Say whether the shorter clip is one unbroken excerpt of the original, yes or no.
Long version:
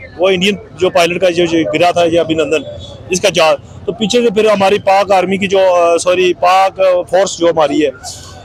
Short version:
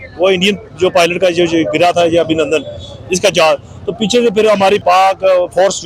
no